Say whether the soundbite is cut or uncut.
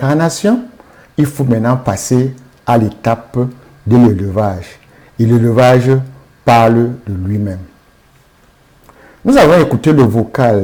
uncut